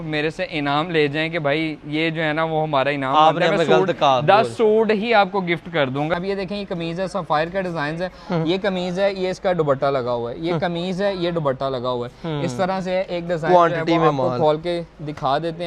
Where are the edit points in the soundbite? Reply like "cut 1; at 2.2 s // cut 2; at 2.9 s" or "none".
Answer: cut 1; at 6.1 s